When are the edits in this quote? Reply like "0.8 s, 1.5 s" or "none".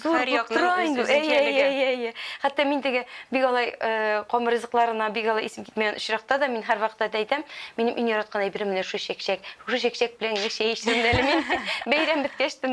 none